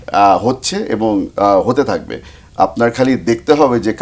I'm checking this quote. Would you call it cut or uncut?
uncut